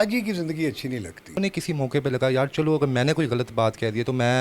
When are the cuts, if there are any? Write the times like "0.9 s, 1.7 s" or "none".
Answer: 1.4 s